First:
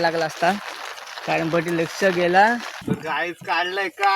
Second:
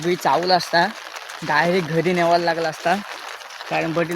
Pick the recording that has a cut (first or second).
first